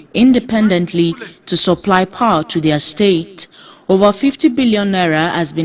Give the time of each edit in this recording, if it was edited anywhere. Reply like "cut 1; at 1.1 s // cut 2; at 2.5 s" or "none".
none